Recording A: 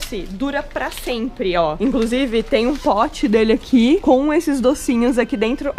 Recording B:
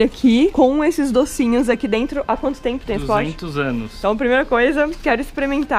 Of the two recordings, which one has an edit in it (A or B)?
B